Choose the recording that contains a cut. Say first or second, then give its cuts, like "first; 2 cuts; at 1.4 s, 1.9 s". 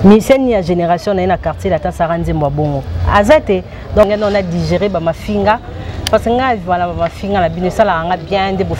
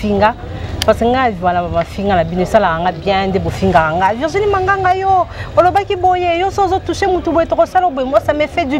first; 1 cut; at 4.1 s